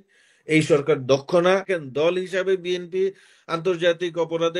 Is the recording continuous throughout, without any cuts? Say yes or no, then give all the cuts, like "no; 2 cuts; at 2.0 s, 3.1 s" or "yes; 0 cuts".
no; 1 cut; at 1.7 s